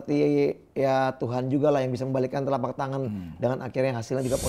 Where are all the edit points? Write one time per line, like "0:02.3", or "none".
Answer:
none